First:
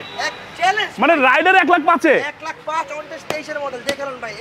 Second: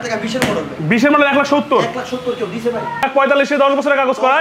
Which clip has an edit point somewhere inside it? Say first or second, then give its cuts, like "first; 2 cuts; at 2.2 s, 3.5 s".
second; 1 cut; at 3.0 s